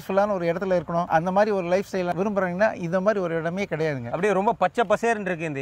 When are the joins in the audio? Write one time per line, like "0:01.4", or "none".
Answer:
0:01.1
0:02.1
0:04.1